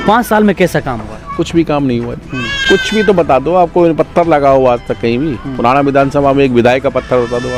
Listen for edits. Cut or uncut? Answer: uncut